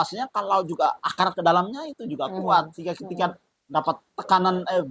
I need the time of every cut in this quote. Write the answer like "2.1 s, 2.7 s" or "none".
none